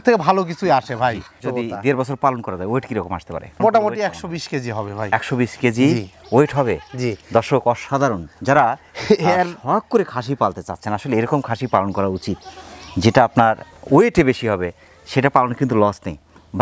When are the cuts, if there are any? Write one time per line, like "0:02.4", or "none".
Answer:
none